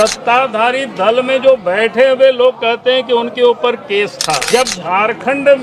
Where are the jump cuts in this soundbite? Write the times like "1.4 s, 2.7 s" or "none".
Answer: 4.4 s